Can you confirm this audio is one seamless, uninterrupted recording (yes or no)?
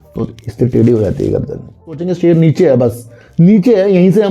no